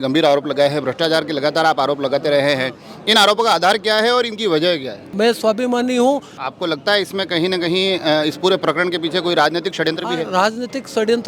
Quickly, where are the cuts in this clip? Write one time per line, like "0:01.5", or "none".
0:05.1
0:06.4